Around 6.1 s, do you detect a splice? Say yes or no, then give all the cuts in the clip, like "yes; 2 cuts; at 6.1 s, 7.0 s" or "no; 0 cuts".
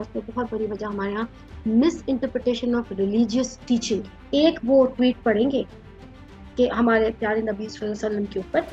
no; 1 cut; at 4.2 s